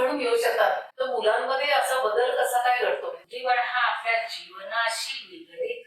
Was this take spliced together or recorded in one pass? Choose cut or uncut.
cut